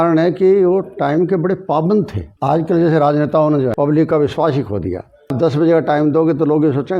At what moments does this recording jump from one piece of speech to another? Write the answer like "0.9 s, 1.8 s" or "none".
2.2 s, 3.7 s, 5.3 s